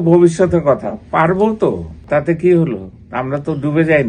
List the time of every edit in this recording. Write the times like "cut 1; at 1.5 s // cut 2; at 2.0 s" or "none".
cut 1; at 2.0 s